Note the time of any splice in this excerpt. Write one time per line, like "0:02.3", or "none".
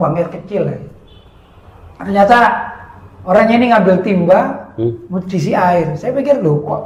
none